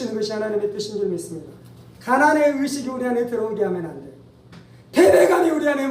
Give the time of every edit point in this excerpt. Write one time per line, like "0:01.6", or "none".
0:01.9